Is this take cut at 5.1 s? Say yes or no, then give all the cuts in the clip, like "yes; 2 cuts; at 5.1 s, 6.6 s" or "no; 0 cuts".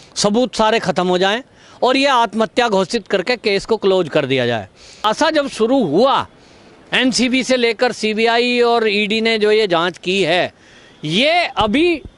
yes; 1 cut; at 5.1 s